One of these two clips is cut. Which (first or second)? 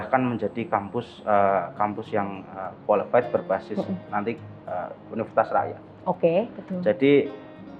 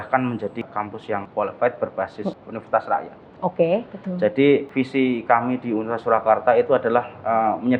second